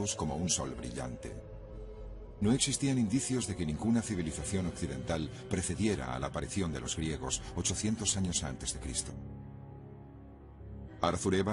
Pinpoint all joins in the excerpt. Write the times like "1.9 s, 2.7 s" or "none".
none